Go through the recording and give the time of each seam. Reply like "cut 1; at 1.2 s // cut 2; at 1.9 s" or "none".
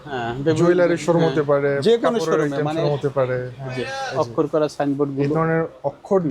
cut 1; at 3.8 s